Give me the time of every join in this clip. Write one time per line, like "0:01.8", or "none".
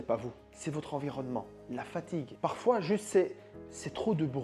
none